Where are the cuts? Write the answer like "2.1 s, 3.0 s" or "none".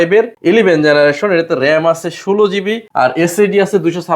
2.8 s